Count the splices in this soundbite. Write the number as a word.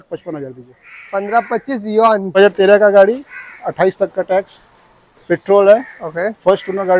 one